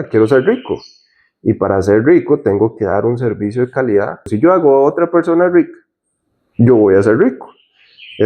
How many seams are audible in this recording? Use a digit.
0